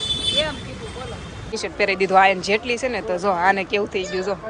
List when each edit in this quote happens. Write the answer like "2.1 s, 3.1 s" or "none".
1.5 s